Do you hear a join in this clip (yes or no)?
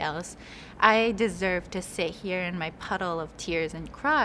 no